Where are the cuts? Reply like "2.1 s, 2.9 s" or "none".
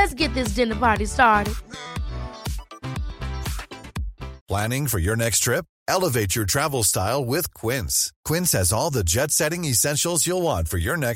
4.4 s